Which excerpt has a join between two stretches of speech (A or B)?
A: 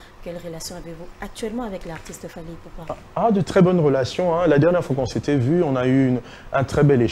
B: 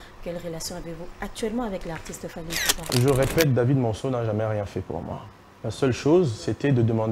B